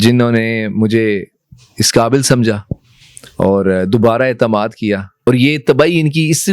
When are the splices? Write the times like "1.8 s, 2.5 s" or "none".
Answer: 5.3 s